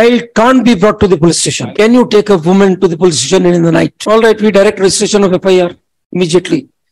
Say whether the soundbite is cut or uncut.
cut